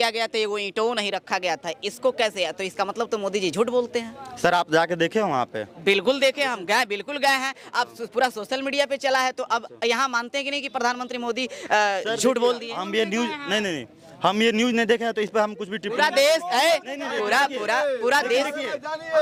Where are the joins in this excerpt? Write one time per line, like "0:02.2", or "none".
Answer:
none

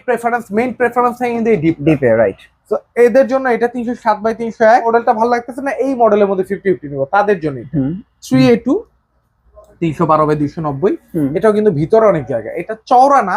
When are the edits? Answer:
0:04.9

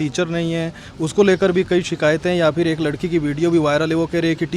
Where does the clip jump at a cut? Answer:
none

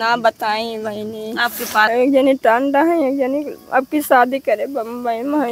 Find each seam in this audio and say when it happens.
0:01.9

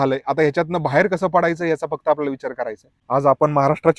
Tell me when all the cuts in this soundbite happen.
0:02.9

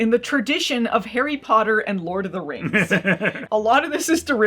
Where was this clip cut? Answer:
0:03.4

